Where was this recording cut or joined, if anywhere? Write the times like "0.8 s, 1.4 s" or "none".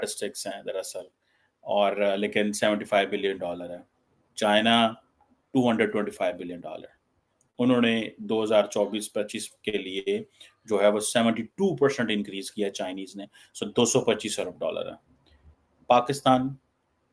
none